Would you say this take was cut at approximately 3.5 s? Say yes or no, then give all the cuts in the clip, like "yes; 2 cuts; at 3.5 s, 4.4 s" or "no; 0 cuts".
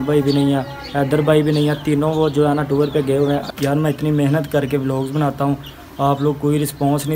yes; 1 cut; at 3.5 s